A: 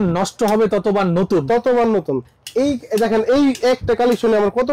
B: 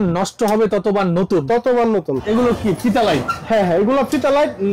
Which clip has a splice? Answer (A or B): B